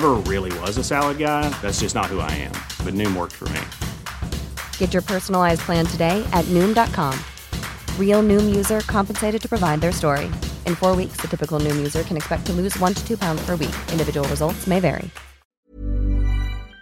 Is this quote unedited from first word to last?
no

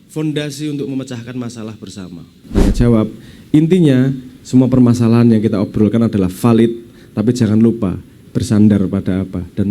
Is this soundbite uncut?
no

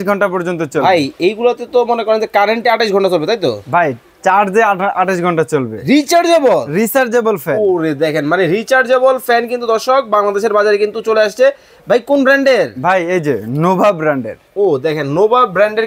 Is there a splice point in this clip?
no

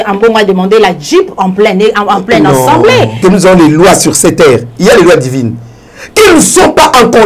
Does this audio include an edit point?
yes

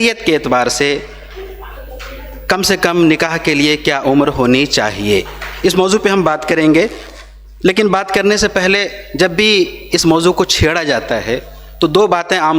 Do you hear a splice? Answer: no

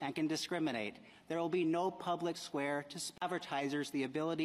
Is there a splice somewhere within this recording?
no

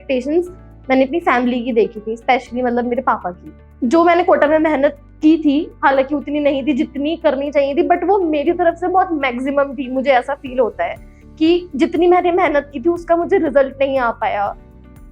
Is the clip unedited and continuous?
yes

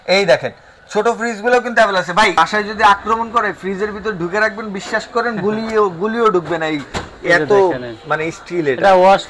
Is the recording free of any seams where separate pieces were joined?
no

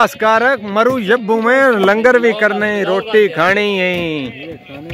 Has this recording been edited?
no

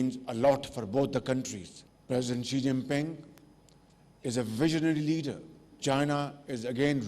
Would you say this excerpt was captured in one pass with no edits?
no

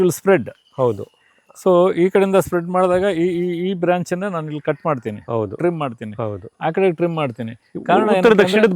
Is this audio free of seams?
yes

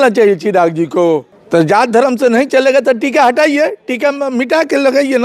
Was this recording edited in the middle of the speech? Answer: yes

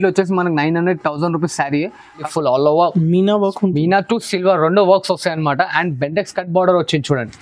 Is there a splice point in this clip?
yes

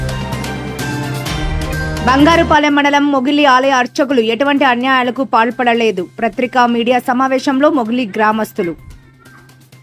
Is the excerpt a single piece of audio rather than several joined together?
no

